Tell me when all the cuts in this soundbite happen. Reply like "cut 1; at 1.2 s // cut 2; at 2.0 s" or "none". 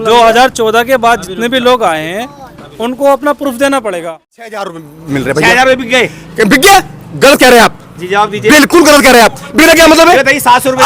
cut 1; at 4.8 s